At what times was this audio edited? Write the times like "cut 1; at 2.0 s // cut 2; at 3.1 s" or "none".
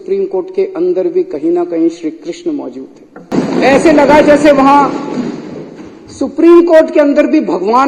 cut 1; at 3.3 s